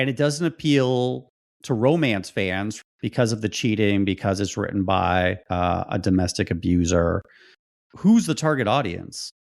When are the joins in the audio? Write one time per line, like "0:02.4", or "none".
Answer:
0:07.5

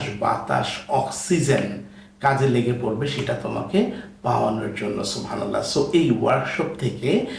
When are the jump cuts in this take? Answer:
none

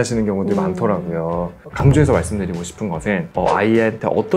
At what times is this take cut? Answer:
0:01.6

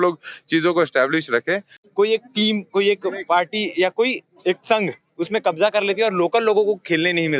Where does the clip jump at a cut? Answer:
0:01.7

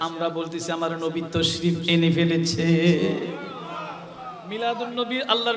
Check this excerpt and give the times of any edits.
none

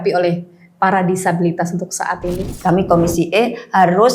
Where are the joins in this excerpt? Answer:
0:02.6

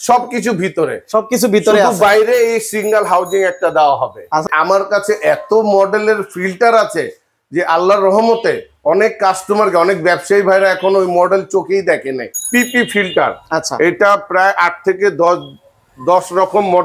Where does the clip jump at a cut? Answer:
0:04.5
0:12.2

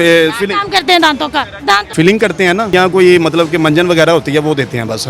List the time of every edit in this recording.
0:01.9
0:02.7

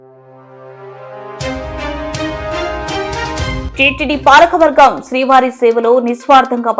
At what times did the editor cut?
0:03.6

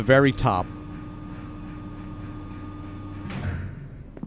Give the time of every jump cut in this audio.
0:01.2

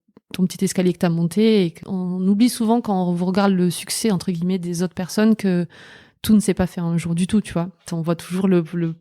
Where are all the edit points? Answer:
0:01.8
0:07.9

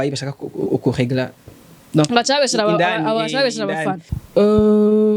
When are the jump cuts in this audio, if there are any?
0:04.1

